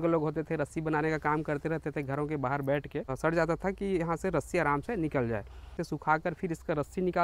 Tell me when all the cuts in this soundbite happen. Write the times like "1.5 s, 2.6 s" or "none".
3.2 s, 5.9 s